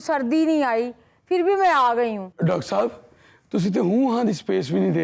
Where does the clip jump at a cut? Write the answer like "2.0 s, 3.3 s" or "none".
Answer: 2.3 s

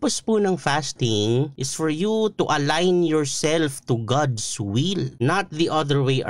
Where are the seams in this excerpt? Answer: 1.6 s, 5.1 s

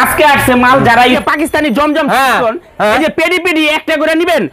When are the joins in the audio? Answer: 1.2 s

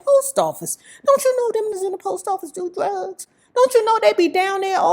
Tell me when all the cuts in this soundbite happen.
1.7 s

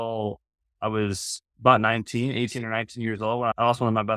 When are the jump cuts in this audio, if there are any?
none

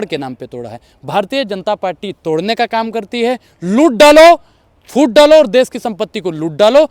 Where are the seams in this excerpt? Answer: none

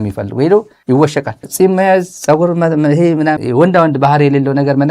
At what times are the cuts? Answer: 1.4 s, 3.4 s

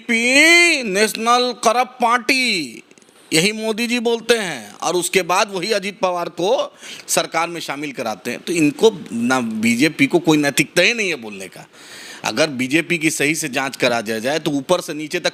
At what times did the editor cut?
none

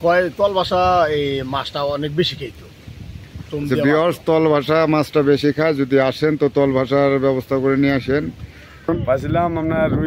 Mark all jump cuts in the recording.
8.9 s

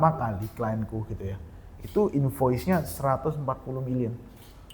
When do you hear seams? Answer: none

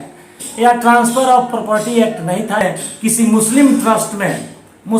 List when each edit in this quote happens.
2.6 s

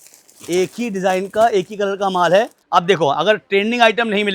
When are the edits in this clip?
2.6 s

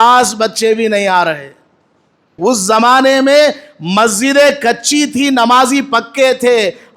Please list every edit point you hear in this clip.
2.4 s

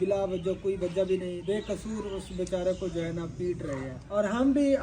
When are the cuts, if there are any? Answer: 1.4 s, 3.9 s

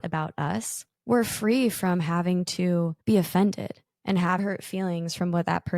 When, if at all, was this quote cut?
2.9 s, 4.4 s

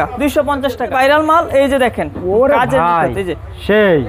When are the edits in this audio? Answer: 0.9 s

